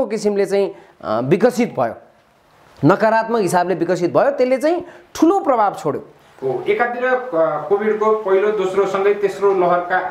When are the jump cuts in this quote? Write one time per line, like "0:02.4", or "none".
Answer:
none